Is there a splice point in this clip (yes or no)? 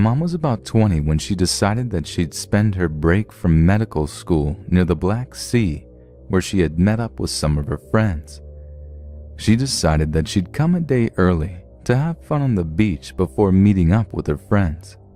no